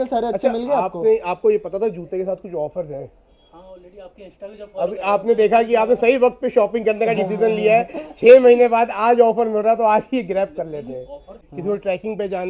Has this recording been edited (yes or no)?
yes